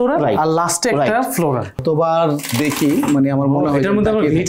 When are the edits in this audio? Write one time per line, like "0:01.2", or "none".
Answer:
0:01.8